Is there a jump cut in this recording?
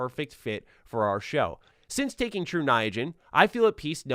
yes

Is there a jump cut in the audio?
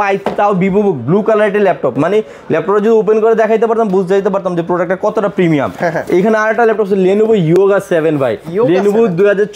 no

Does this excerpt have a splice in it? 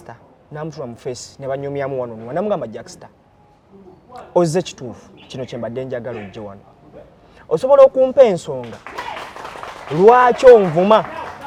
no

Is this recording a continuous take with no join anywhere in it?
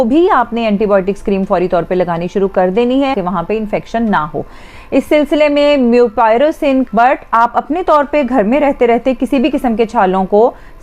no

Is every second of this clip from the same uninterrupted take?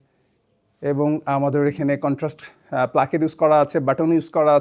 yes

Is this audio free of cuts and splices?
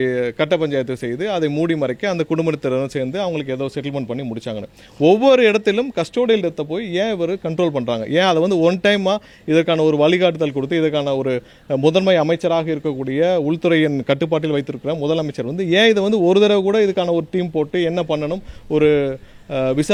yes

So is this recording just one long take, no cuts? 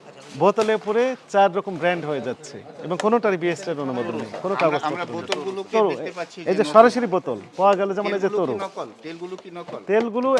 yes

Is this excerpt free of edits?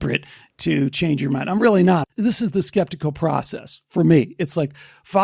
no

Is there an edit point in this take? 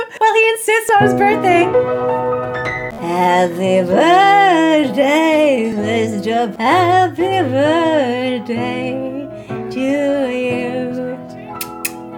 no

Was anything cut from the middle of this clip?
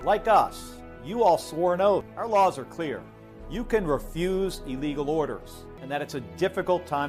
yes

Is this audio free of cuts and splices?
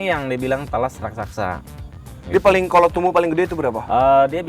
yes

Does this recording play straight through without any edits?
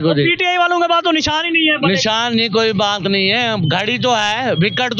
yes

